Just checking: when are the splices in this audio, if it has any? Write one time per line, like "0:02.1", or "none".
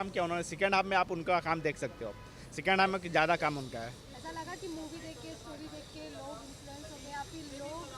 none